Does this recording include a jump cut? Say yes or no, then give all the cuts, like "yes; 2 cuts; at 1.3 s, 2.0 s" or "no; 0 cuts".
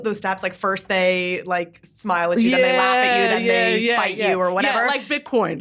no; 0 cuts